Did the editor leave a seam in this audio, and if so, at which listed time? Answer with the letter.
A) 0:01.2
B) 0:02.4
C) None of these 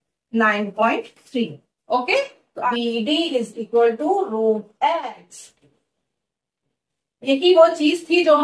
B